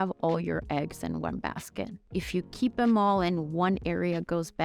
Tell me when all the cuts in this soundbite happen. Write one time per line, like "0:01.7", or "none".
0:02.0